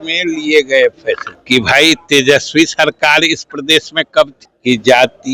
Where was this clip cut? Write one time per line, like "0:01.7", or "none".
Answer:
0:01.3
0:04.4